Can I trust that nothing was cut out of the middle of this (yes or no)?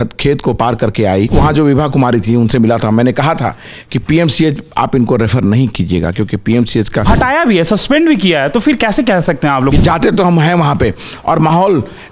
no